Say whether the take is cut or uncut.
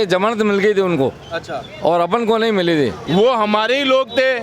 cut